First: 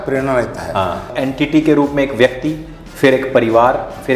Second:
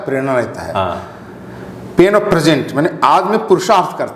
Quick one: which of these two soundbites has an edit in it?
first; 1 cut; at 1.1 s

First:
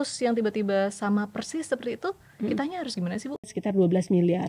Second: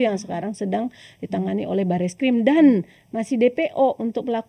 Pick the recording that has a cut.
first; 1 cut; at 3.5 s

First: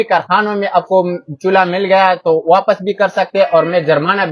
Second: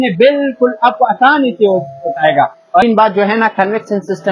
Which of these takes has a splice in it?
second; 1 cut; at 2.8 s

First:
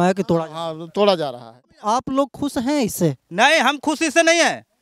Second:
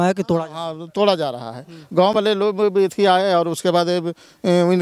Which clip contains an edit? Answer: first; 1 cut; at 1.8 s

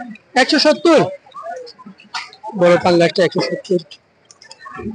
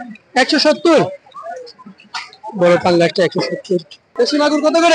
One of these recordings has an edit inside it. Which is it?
second; 1 cut; at 4.0 s

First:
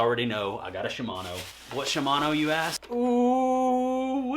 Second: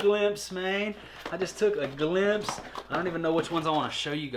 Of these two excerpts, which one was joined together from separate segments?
first; 1 cut; at 2.7 s

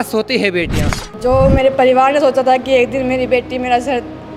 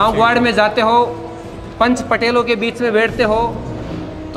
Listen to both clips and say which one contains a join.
first; 1 cut; at 1.2 s

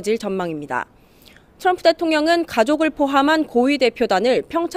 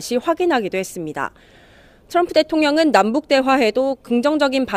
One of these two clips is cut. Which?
second; 1 cut; at 2.7 s

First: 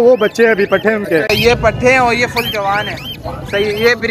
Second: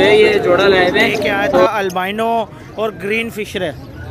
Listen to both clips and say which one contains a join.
second; 1 cut; at 1.7 s

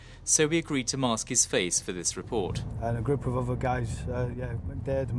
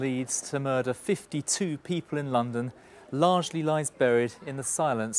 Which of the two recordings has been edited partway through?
second; 1 cut; at 2.5 s

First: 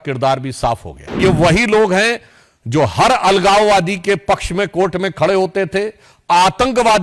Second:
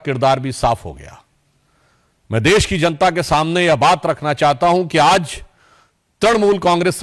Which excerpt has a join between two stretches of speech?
first; 1 cut; at 1.2 s

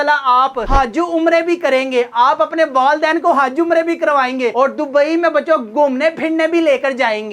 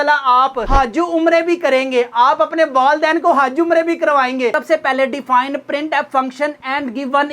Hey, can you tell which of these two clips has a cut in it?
second; 1 cut; at 4.5 s

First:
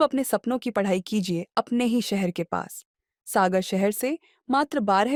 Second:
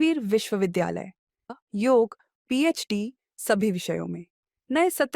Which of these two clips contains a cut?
second; 1 cut; at 1.5 s

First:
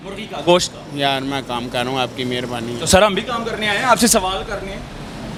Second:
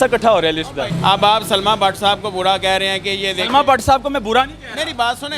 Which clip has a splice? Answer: second; 1 cut; at 0.9 s

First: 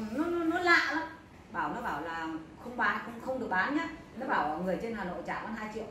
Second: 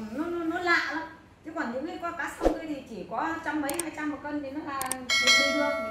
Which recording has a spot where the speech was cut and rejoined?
first; 1 cut; at 1.4 s

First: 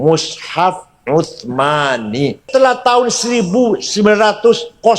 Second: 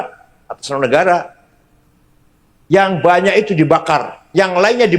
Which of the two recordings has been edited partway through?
first; 1 cut; at 2.5 s

